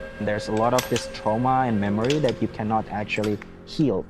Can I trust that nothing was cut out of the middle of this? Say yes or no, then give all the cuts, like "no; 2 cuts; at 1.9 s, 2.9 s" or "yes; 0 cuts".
yes; 0 cuts